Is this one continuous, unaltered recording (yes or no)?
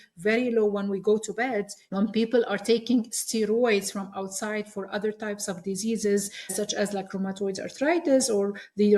no